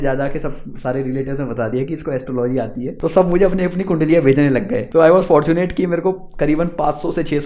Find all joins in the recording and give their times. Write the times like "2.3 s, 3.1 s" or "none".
2.9 s, 4.8 s